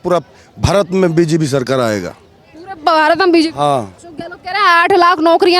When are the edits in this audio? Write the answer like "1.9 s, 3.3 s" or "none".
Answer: 4.0 s